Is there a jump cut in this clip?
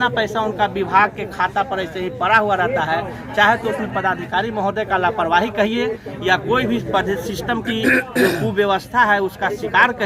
no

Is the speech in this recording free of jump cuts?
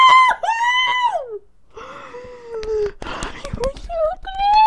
yes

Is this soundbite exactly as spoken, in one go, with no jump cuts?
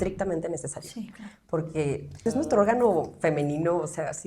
no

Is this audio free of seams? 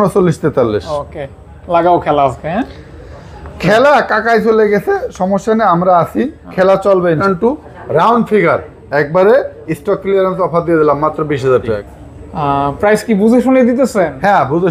no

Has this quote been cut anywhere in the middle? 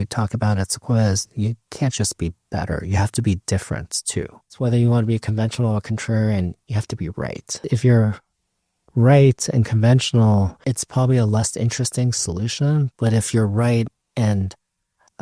yes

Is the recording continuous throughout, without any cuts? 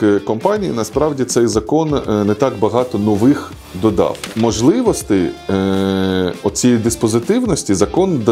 no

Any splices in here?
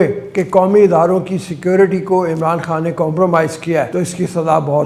yes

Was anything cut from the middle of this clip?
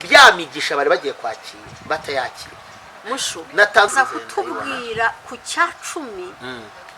yes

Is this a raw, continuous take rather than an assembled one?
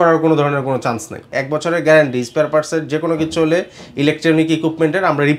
no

